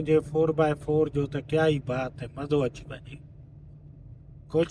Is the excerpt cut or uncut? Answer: uncut